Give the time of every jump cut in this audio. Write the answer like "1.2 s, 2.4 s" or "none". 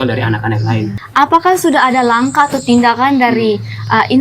1.0 s